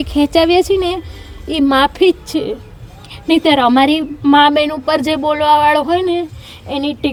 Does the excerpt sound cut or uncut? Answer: uncut